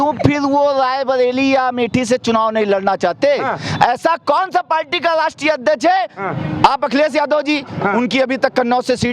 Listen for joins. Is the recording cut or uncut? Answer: uncut